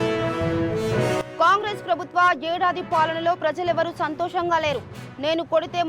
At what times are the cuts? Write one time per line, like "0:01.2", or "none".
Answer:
none